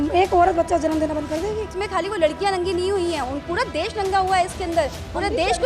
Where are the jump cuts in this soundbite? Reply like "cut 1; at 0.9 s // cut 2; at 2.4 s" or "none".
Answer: cut 1; at 1.7 s